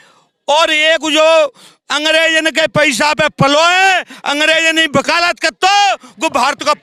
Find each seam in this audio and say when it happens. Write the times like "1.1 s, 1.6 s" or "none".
none